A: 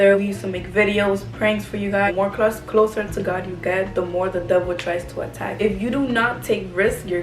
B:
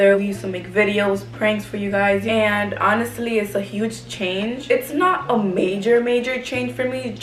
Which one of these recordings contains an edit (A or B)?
A